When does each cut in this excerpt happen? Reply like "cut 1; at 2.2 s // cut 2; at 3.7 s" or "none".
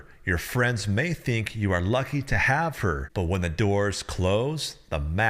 cut 1; at 3.1 s